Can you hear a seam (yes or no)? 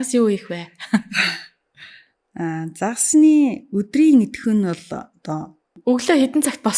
yes